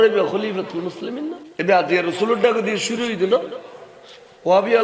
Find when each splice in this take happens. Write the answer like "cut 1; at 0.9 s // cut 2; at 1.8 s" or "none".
cut 1; at 1.4 s